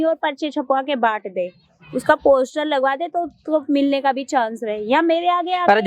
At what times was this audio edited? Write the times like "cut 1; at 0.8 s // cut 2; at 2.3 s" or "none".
none